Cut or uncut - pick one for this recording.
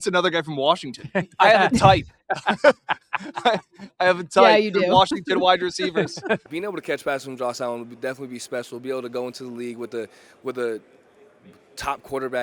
cut